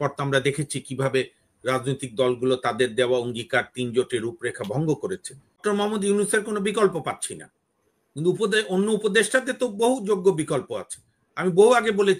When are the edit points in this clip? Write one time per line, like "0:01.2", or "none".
0:05.6